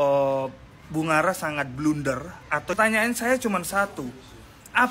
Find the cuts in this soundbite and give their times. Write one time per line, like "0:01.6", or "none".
0:02.7